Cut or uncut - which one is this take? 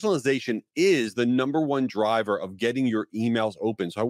uncut